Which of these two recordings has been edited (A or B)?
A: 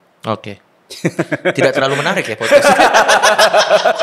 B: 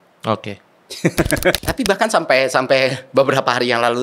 B